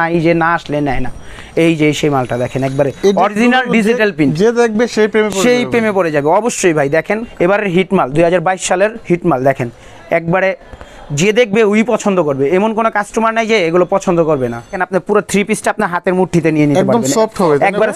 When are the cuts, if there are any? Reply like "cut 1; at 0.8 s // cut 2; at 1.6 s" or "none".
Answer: cut 1; at 7.3 s // cut 2; at 14.8 s